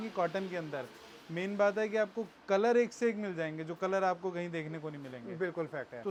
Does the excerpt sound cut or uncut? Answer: uncut